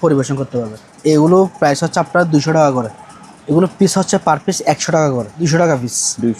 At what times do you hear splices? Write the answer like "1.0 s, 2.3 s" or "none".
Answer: 0.9 s, 3.0 s, 5.3 s